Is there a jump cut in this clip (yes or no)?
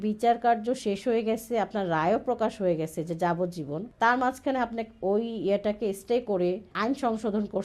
yes